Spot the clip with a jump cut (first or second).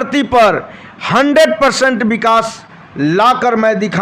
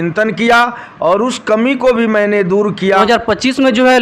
second